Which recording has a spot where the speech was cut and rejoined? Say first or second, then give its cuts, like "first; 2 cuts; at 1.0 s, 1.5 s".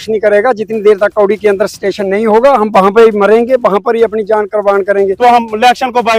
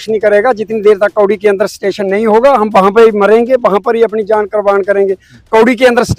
first; 1 cut; at 5.1 s